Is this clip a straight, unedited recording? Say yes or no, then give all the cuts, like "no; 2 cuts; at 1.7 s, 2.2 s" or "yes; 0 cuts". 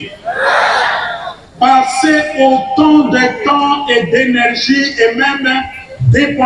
yes; 0 cuts